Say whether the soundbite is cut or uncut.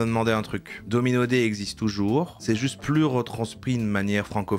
uncut